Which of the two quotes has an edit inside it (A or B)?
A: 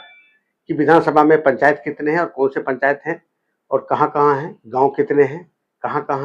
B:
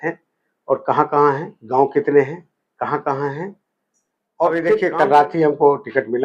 B